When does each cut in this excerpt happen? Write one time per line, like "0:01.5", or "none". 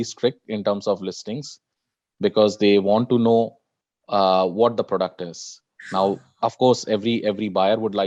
none